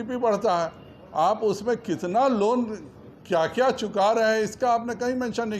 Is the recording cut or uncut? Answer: uncut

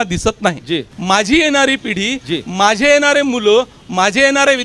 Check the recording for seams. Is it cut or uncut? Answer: cut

